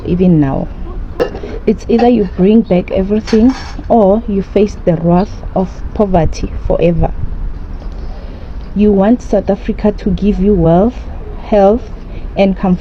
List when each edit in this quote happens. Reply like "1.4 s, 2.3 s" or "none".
1.2 s